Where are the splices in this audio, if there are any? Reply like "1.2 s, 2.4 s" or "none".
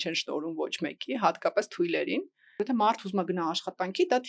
2.4 s